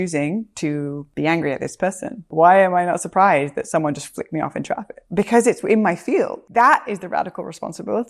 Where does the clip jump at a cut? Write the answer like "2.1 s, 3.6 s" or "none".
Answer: 1.0 s, 2.3 s, 5.0 s, 6.4 s